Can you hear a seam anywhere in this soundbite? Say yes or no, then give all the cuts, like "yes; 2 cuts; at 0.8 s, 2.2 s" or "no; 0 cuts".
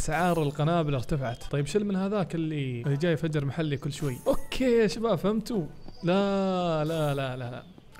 yes; 3 cuts; at 1.4 s, 2.8 s, 4.1 s